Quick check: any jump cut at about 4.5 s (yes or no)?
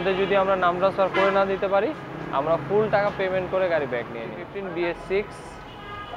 yes